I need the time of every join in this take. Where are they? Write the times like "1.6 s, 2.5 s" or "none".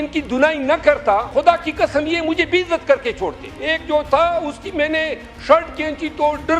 1.3 s, 3.5 s